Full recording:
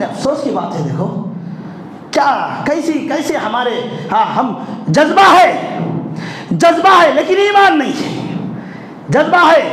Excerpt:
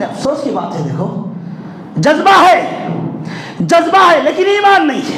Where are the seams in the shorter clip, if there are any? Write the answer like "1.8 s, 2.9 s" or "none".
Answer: 1.8 s